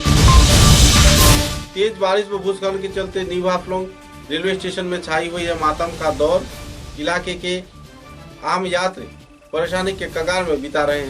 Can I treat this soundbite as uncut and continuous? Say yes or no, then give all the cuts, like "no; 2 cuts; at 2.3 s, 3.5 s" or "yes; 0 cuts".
no; 1 cut; at 1.5 s